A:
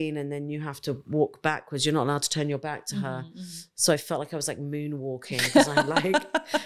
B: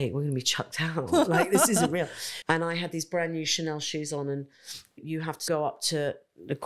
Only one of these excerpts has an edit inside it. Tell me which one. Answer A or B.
B